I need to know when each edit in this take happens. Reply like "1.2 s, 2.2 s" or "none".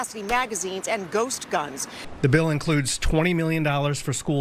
none